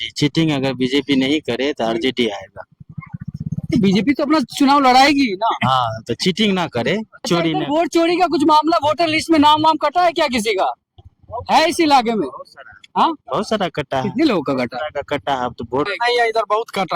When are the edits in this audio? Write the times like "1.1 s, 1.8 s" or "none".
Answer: 7.3 s, 15.9 s